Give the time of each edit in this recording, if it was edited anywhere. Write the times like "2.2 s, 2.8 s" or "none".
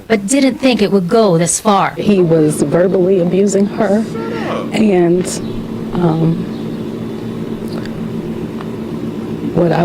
8.7 s